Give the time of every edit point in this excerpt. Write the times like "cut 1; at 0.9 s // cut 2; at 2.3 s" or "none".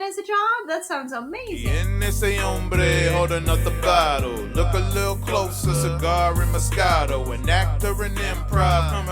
cut 1; at 1.7 s